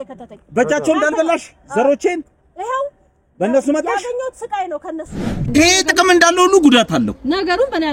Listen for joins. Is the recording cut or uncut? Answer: cut